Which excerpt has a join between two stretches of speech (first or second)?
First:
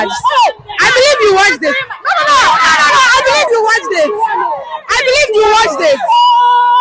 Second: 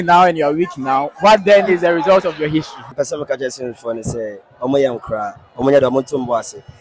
second